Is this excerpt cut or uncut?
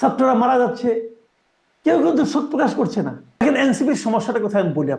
cut